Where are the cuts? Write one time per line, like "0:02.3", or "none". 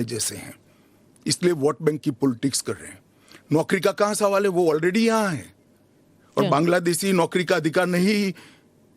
0:02.3